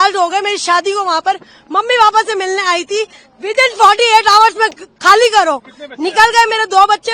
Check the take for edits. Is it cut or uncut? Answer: uncut